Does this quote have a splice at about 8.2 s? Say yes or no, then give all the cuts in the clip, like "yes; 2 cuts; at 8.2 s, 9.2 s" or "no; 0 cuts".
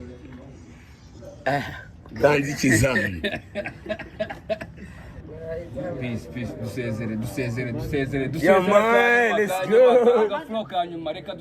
no; 1 cut; at 5.1 s